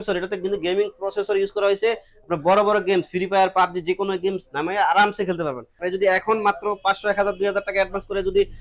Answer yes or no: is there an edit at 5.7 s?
yes